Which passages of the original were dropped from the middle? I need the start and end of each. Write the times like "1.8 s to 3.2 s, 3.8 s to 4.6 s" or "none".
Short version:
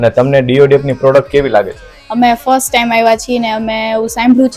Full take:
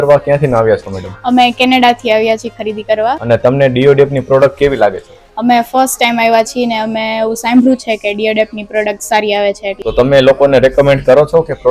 none